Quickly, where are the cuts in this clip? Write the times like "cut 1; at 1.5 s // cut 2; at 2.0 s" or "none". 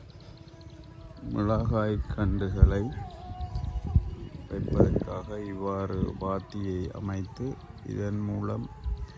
none